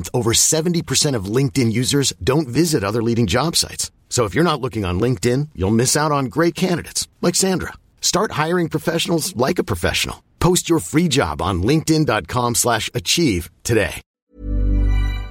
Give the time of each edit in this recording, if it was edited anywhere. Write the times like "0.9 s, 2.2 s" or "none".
14.3 s